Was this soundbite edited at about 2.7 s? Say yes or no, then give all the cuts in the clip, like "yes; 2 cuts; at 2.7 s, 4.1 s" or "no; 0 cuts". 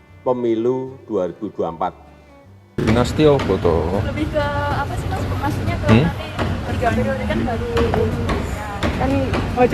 yes; 1 cut; at 2.7 s